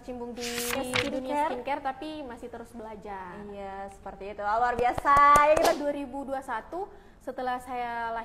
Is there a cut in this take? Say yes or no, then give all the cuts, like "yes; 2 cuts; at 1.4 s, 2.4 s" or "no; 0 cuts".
yes; 2 cuts; at 0.8 s, 5.7 s